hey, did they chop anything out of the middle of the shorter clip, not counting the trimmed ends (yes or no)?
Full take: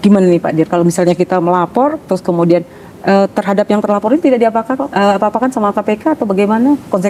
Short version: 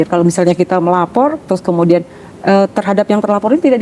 no